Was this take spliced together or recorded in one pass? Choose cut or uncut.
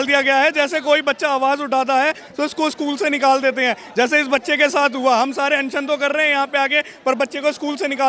uncut